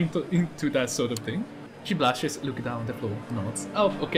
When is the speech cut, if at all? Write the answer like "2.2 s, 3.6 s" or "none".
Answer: 1.7 s